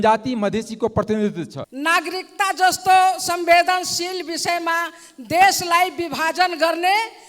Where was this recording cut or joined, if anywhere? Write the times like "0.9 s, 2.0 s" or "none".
1.6 s